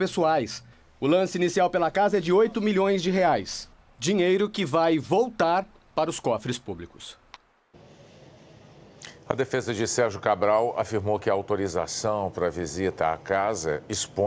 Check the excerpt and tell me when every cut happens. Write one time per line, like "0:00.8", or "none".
0:03.9